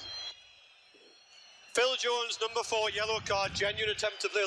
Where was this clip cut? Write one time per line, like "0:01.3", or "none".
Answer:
0:01.0